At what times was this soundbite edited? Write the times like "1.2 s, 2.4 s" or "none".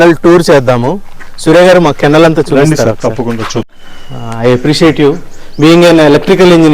3.8 s

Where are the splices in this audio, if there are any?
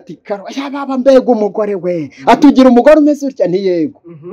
none

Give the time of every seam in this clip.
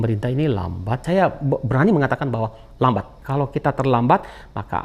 1.0 s, 3.2 s

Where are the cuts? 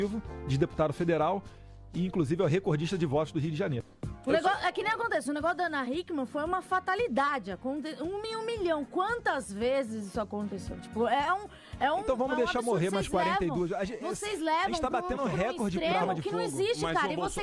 7.9 s

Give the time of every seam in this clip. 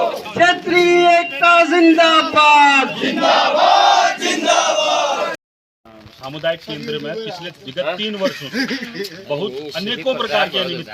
5.3 s

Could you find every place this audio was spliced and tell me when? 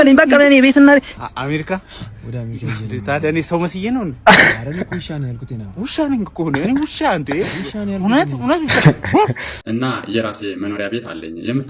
1.1 s, 9.5 s

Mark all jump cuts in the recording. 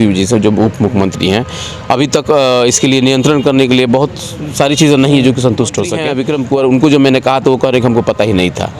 6.0 s

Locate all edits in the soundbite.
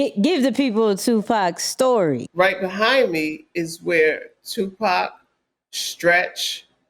2.2 s

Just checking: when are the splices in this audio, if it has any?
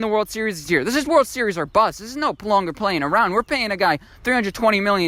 none

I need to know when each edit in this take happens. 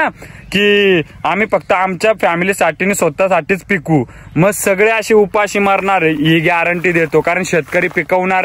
none

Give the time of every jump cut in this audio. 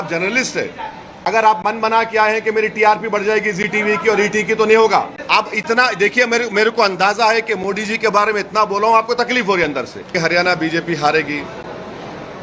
1.1 s, 5.2 s, 10.1 s

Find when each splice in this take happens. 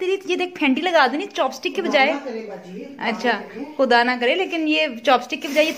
none

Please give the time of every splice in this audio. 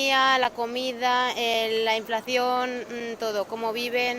none

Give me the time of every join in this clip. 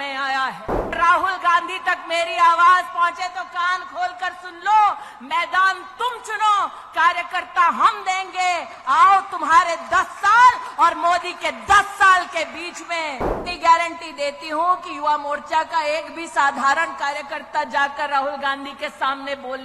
0.9 s, 13.4 s

